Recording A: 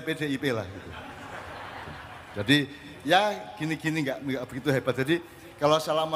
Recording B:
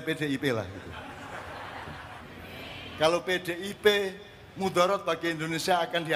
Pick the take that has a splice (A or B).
B